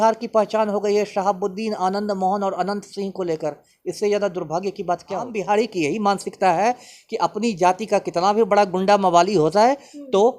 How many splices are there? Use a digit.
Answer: 1